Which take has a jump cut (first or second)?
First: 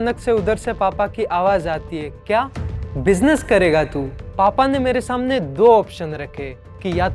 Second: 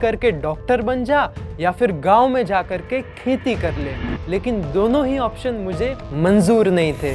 first